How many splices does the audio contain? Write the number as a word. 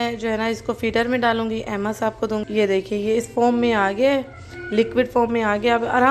zero